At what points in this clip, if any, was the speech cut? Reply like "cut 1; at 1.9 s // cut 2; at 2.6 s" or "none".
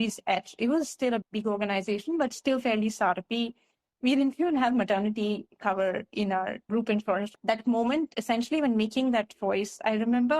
cut 1; at 7.3 s

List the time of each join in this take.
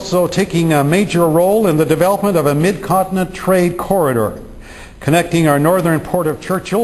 cut 1; at 4.5 s

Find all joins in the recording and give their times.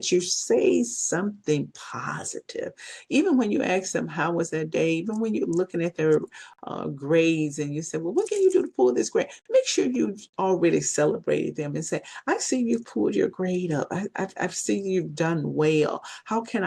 none

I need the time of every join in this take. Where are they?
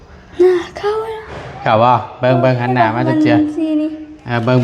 none

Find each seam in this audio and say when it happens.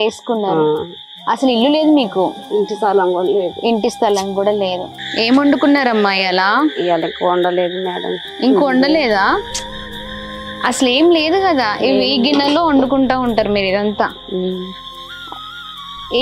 cut 1; at 5.0 s

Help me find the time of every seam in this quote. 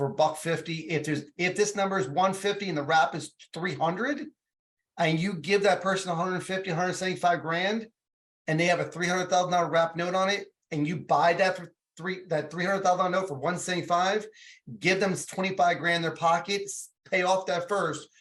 none

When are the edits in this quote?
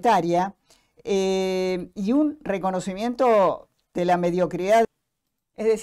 cut 1; at 4.9 s

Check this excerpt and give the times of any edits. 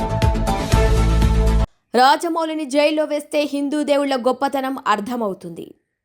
cut 1; at 1.7 s

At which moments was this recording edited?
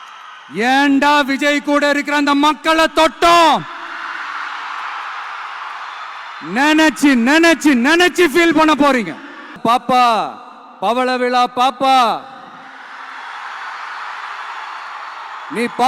cut 1; at 9.6 s

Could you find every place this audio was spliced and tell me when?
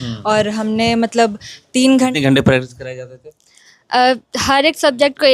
cut 1; at 2.1 s

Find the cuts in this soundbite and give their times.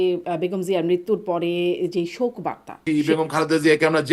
cut 1; at 2.8 s

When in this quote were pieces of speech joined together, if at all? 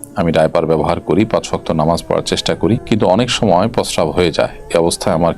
cut 1; at 2.8 s

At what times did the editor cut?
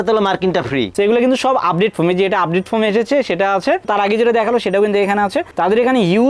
cut 1; at 0.9 s

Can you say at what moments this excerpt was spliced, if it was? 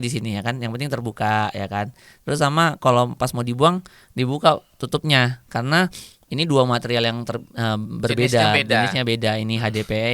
none

